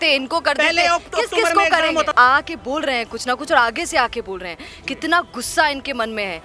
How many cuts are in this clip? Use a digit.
1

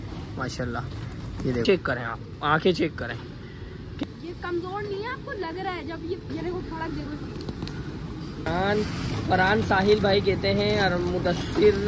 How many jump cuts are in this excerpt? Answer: 3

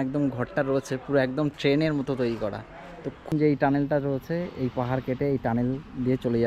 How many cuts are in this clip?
1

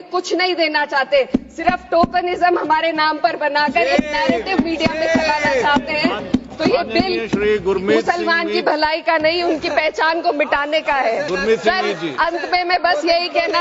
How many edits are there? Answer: 0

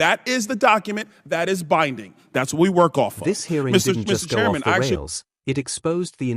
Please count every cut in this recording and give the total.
1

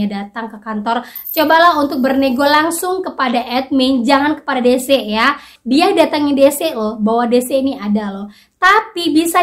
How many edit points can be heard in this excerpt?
2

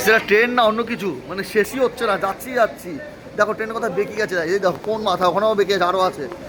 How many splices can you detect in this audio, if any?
0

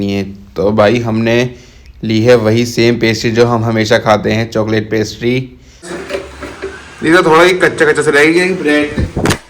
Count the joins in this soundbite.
1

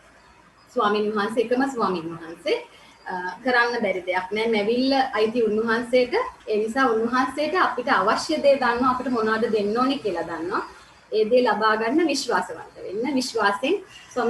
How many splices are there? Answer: 1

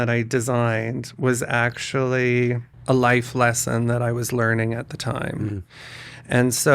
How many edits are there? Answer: 1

